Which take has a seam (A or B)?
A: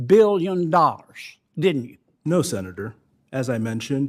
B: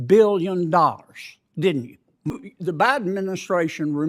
B